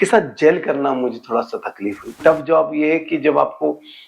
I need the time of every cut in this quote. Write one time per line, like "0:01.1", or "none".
0:02.2